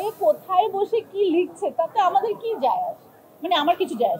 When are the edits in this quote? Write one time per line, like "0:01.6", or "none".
none